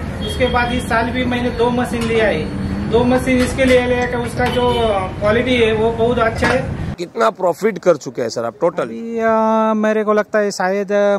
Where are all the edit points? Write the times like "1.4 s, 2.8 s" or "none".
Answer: 7.0 s